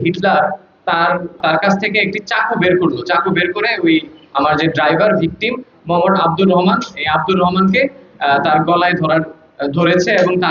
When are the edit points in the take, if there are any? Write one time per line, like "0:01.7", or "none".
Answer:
0:01.4